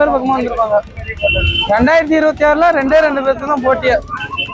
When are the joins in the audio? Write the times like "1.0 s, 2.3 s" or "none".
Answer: none